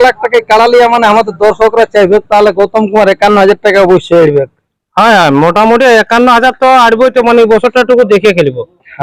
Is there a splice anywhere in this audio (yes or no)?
no